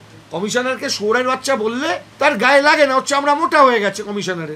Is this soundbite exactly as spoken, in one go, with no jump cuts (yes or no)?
no